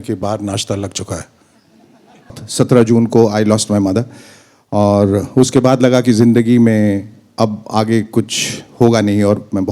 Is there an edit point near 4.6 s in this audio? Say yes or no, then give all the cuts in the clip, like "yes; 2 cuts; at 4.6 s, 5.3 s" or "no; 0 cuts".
no; 1 cut; at 2.3 s